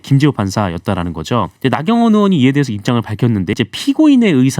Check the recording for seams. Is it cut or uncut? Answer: cut